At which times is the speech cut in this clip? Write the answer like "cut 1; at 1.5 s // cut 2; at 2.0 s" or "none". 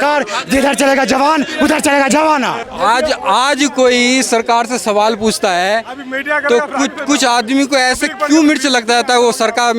cut 1; at 2.6 s

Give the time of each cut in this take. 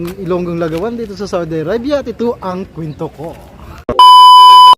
cut 1; at 3.9 s

